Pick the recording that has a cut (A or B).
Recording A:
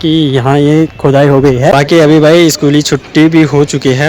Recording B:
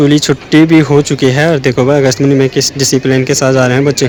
A